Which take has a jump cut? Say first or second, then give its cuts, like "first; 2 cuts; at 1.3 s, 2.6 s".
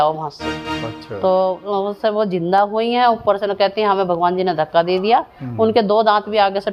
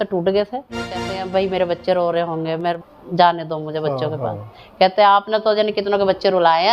second; 2 cuts; at 1.2 s, 2.8 s